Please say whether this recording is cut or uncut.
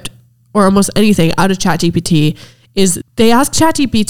cut